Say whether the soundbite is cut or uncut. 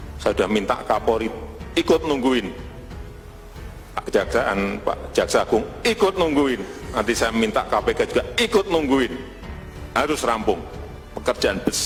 uncut